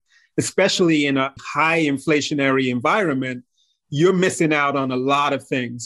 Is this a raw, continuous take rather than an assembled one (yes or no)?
no